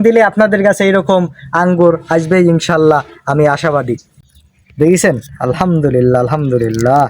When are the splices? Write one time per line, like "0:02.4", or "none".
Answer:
0:04.1